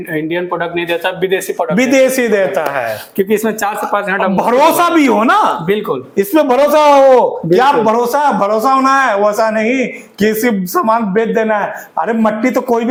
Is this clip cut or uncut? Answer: uncut